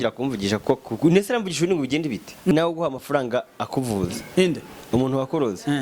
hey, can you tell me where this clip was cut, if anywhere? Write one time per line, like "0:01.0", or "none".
0:02.5

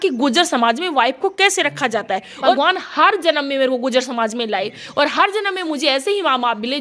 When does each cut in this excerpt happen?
0:02.5

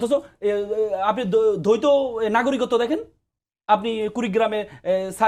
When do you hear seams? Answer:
none

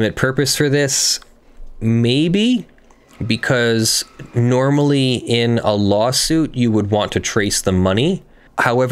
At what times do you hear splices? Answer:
none

